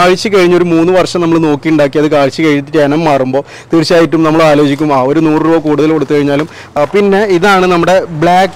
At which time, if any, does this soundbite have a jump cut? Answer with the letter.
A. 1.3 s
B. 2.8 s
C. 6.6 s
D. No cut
C